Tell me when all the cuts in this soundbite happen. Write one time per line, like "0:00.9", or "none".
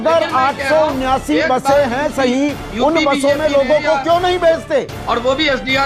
0:04.9